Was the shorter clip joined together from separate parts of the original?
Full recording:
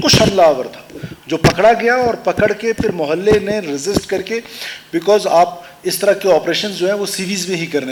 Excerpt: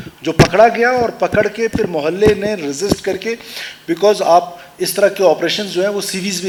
no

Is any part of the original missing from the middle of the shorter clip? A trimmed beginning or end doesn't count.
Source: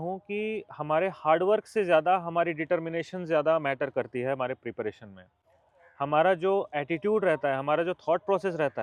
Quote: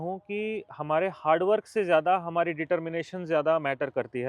no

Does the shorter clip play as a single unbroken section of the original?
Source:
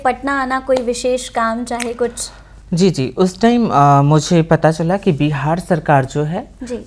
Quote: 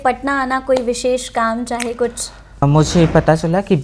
no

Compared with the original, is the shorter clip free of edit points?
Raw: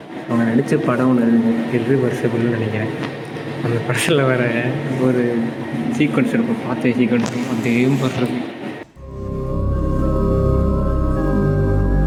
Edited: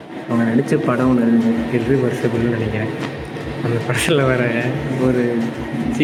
yes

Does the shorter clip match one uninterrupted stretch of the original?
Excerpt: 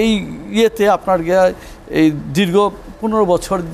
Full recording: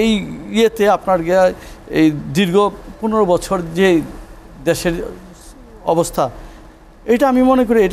yes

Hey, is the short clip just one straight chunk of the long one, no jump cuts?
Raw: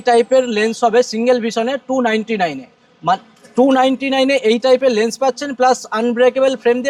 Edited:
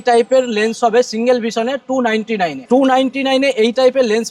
no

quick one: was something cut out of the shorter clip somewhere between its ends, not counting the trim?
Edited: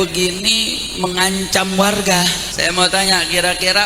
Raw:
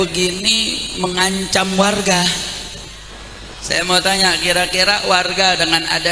yes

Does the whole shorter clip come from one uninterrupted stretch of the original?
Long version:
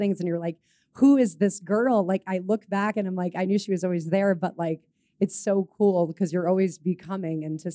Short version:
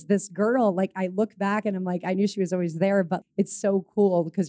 no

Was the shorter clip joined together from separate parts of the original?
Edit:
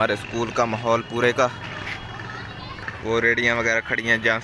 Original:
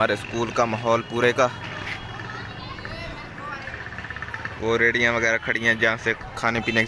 yes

